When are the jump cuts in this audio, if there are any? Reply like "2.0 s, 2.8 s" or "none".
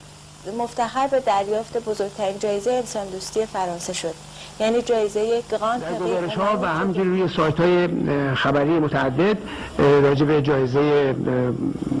6.2 s